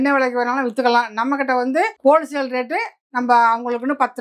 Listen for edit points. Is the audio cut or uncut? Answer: uncut